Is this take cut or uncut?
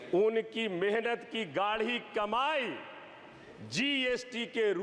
uncut